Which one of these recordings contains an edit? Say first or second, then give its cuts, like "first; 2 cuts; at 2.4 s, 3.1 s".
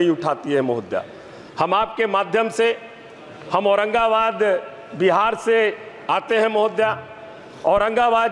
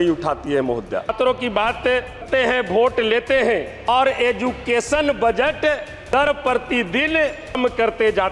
second; 5 cuts; at 1.1 s, 2.2 s, 3.9 s, 6.1 s, 7.6 s